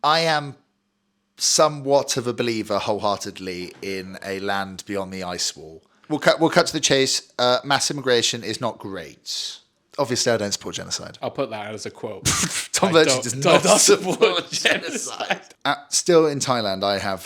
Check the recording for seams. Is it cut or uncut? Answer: cut